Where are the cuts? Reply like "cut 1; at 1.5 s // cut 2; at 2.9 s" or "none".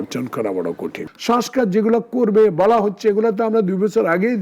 cut 1; at 1.0 s